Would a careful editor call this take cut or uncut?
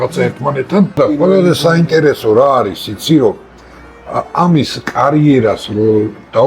cut